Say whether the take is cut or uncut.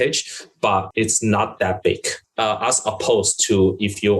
cut